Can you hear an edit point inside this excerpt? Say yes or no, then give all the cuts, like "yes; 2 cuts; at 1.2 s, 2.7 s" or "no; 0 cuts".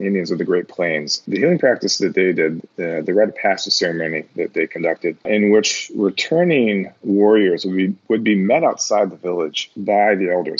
yes; 3 cuts; at 1.2 s, 5.3 s, 9.7 s